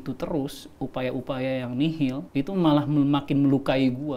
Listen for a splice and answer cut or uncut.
cut